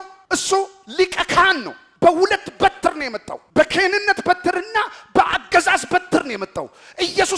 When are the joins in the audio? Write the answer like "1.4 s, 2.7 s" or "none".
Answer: none